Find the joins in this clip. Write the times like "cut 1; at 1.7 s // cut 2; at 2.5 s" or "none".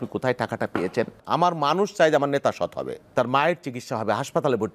cut 1; at 1.2 s // cut 2; at 3.1 s